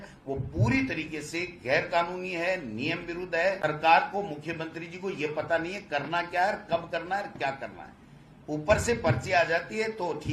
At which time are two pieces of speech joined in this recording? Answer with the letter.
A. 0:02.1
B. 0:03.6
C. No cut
B